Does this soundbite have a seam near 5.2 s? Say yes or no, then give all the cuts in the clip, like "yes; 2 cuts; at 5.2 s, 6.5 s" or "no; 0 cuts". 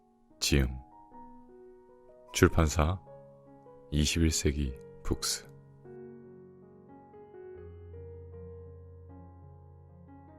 yes; 1 cut; at 5.2 s